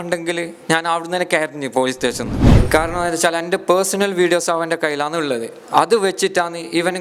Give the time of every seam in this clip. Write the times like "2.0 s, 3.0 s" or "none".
2.6 s